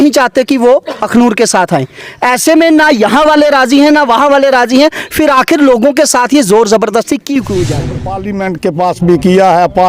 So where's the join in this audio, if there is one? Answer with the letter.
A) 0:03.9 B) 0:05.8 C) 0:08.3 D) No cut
C